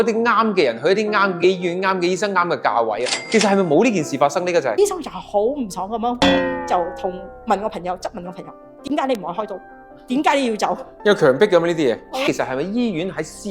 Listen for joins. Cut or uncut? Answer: cut